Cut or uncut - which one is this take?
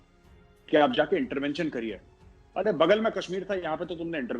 uncut